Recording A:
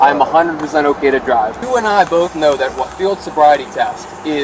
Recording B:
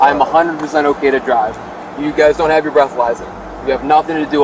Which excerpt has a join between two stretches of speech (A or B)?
A